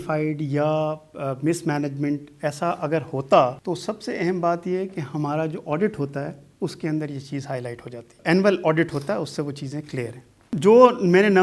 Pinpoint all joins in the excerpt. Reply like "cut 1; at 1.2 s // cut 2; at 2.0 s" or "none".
none